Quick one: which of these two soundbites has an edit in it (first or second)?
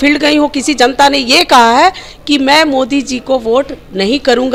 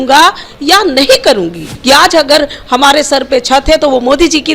second